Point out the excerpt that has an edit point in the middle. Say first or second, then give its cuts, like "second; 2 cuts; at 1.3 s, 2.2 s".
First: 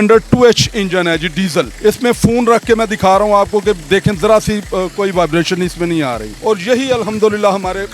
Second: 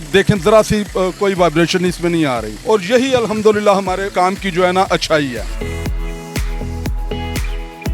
first; 1 cut; at 1.7 s